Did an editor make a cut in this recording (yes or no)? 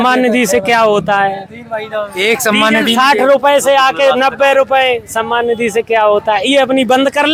no